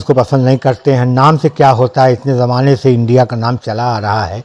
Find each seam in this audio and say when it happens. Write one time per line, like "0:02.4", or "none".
none